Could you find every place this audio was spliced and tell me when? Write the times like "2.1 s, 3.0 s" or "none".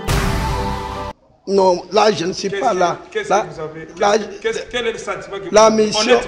1.1 s